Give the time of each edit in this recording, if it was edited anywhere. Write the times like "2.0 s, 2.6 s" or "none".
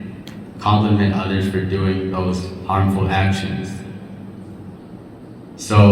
4.8 s

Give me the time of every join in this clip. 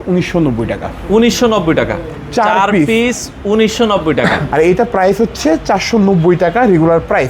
4.4 s

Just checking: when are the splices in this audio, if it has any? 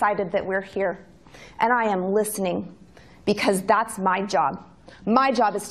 none

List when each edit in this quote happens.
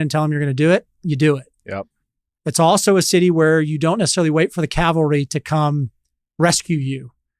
none

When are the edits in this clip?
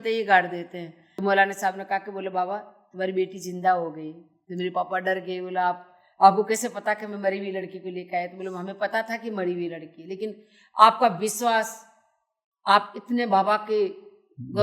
1.0 s

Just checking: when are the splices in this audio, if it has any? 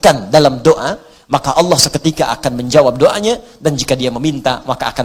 none

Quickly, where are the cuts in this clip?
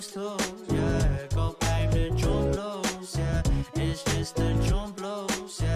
1.6 s

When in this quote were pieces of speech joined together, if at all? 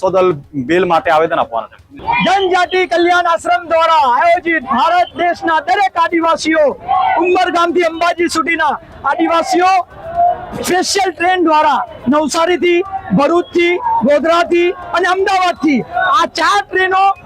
none

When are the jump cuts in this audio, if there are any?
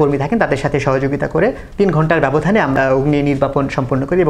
1.6 s, 2.7 s

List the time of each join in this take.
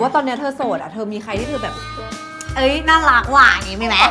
none

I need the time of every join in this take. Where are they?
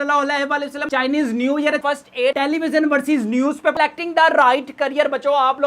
0.8 s, 2.2 s, 3.7 s

